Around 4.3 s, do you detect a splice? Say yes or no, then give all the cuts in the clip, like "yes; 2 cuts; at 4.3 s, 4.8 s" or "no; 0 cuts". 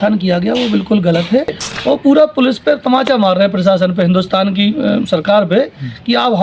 no; 1 cut; at 1.7 s